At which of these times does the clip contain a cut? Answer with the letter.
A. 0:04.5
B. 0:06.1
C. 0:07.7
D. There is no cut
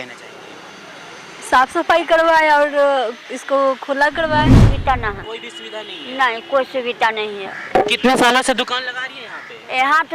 A